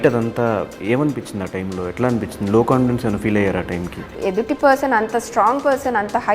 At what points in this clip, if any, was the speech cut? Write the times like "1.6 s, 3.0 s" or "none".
4.1 s